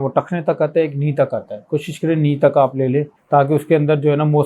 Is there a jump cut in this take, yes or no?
yes